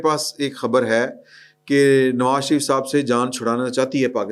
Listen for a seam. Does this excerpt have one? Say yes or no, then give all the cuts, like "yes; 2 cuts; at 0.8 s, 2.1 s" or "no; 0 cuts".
no; 0 cuts